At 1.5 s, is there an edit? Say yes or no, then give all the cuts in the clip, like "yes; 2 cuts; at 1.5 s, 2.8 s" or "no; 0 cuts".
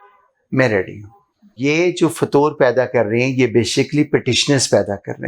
yes; 1 cut; at 1.5 s